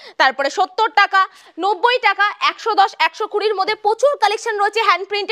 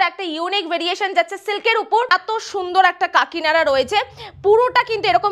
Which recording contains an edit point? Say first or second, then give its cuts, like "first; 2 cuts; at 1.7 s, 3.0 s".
second; 1 cut; at 2.1 s